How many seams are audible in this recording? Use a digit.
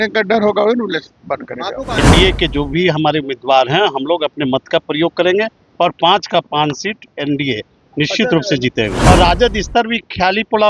2